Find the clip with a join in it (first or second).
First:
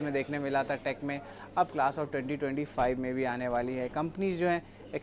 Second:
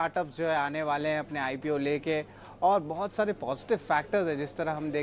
first